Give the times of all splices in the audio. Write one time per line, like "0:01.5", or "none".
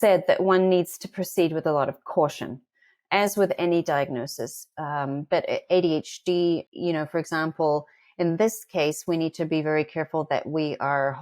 0:06.7